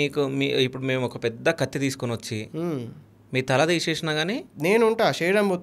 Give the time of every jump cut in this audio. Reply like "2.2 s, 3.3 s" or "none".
4.5 s